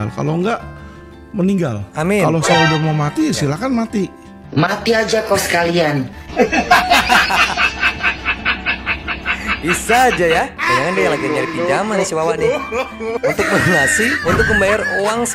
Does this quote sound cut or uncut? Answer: cut